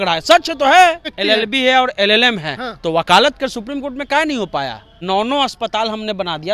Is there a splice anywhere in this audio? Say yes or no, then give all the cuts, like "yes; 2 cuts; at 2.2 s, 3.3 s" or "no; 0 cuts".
yes; 2 cuts; at 1.1 s, 4.9 s